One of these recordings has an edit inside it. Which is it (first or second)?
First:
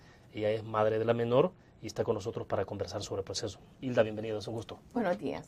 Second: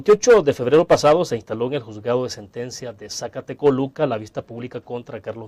first